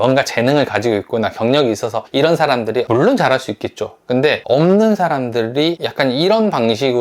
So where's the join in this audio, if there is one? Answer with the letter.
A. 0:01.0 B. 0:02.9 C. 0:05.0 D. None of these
B